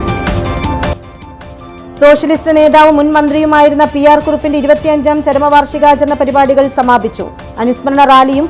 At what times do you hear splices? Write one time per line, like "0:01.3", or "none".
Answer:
0:00.9